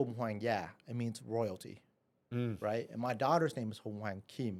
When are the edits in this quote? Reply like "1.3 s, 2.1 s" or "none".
none